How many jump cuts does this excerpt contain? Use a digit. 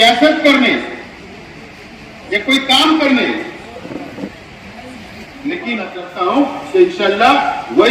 1